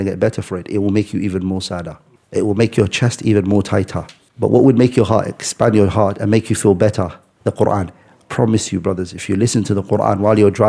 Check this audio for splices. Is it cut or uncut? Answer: uncut